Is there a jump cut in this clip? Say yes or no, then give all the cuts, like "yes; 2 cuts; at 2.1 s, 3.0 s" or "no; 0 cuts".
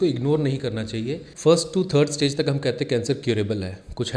yes; 1 cut; at 1.2 s